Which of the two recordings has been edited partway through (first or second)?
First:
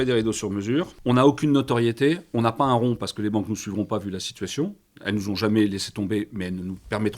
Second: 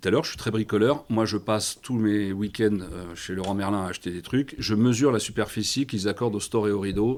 first